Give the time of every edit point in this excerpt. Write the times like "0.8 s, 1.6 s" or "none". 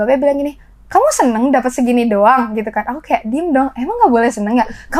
none